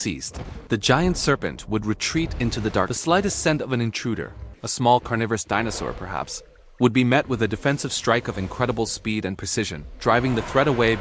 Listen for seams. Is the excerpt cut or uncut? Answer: cut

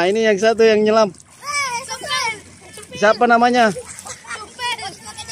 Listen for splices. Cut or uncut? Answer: uncut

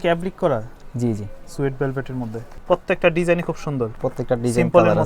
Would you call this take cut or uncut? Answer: cut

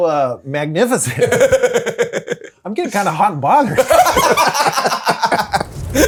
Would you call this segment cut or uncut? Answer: uncut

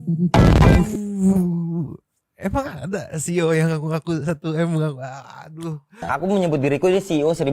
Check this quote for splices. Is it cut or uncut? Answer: cut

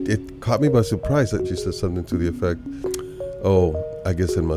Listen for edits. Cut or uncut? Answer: cut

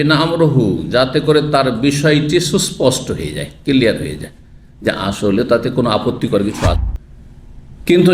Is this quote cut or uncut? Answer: cut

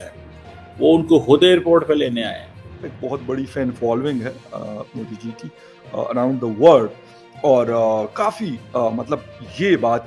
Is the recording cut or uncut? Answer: cut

